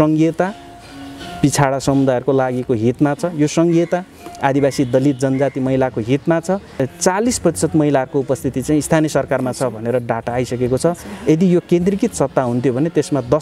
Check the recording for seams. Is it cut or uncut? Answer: cut